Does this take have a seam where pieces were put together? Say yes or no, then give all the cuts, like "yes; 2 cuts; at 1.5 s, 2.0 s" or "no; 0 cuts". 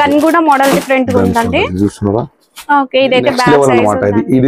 yes; 1 cut; at 3.5 s